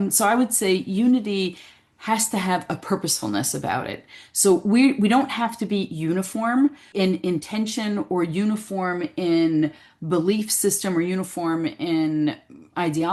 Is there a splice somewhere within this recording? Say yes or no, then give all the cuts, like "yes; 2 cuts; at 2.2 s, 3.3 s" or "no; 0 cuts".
no; 0 cuts